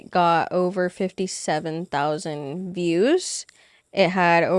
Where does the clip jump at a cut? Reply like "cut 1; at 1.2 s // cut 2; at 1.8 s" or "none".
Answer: none